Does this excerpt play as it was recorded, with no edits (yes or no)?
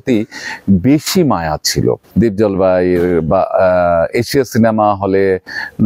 no